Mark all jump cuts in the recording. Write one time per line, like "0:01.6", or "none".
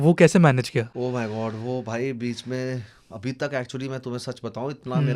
0:00.9